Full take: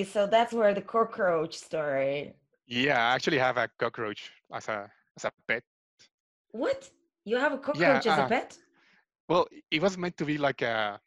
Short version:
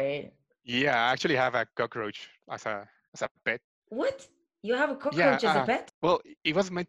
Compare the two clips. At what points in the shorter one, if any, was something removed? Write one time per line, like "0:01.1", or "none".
0:03.7
0:05.9